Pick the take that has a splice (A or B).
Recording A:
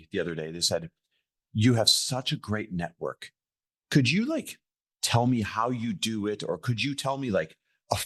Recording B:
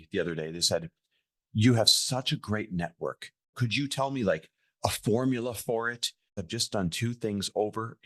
B